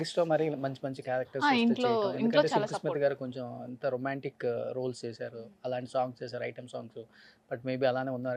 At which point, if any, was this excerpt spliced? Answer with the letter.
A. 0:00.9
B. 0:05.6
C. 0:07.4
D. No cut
D